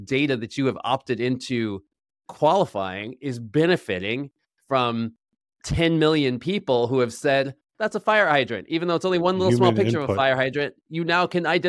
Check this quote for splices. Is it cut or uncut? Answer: uncut